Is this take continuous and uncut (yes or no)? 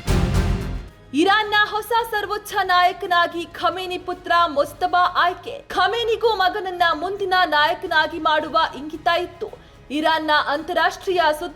no